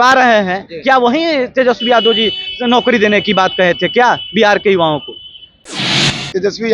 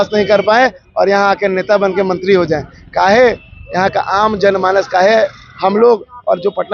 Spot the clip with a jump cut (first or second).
first